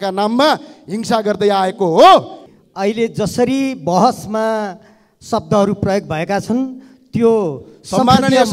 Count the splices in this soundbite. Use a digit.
1